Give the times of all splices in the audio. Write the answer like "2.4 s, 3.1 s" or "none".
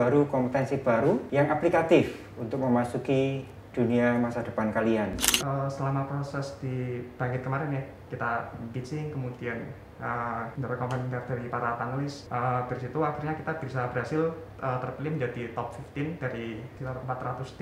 1.3 s, 5.3 s, 10.5 s, 12.2 s, 16.7 s